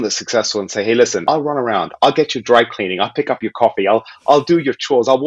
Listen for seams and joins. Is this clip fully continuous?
no; 1 cut; at 1.2 s

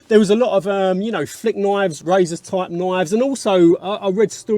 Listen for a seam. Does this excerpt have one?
yes; 1 cut; at 2.0 s

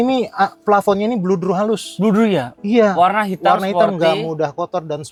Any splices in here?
no; 0 cuts

